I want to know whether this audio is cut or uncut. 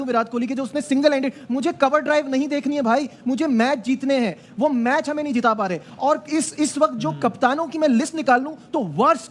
uncut